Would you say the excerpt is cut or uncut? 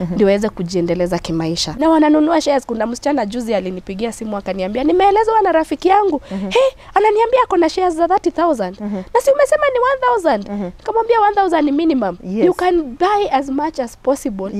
cut